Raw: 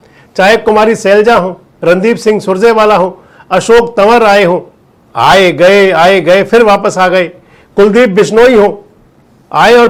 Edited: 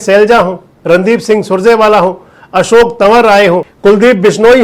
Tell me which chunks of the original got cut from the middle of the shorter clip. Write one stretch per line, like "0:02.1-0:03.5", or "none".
0:04.7-0:07.6